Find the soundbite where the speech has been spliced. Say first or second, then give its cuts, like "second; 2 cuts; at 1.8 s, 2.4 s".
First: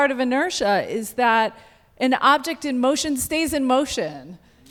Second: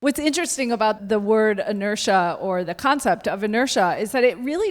second; 1 cut; at 1.0 s